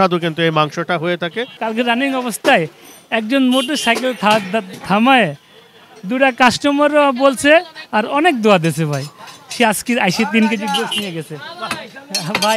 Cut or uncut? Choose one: cut